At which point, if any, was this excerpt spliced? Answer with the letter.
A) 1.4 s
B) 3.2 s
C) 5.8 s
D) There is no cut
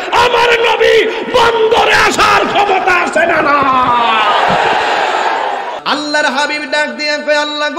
C